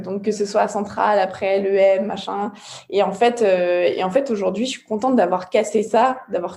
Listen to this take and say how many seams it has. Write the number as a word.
zero